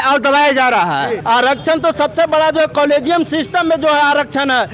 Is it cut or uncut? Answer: cut